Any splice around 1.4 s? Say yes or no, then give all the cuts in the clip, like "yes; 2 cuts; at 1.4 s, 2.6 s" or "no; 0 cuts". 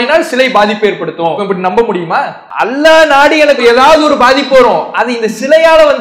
yes; 2 cuts; at 1.4 s, 2.4 s